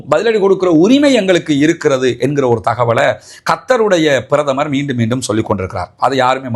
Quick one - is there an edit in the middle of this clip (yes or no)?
no